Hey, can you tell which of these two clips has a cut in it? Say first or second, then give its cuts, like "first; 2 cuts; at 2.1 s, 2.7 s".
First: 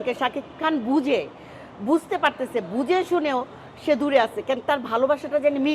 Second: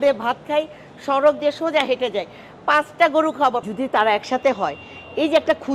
second; 1 cut; at 3.7 s